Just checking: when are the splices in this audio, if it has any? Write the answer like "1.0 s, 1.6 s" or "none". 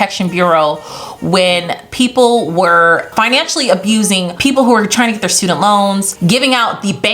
3.1 s, 6.1 s